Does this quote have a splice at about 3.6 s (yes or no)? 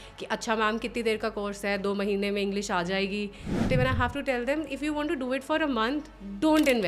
yes